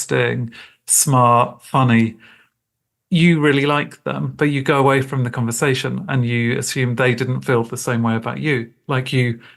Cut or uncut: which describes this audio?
uncut